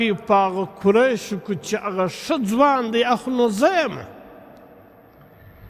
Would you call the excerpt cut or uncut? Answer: uncut